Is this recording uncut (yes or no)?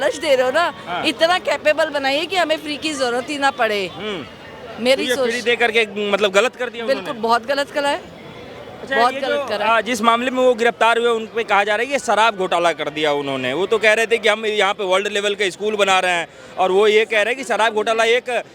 yes